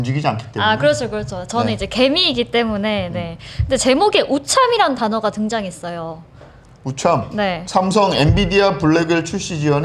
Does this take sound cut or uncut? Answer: uncut